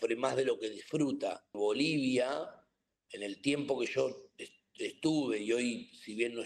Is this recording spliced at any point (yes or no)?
yes